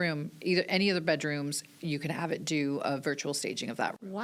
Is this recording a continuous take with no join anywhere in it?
yes; 0 cuts

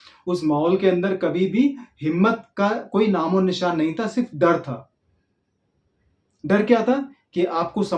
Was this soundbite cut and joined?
no; 0 cuts

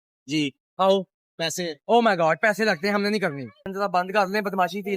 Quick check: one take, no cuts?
no; 1 cut; at 3.6 s

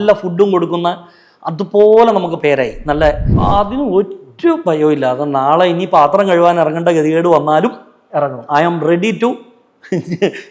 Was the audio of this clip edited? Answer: yes; 1 cut; at 3.3 s

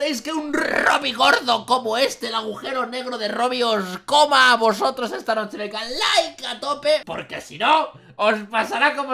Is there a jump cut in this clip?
no; 0 cuts

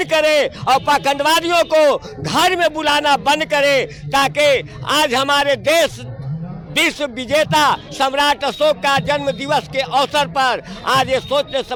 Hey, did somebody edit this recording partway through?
no; 0 cuts

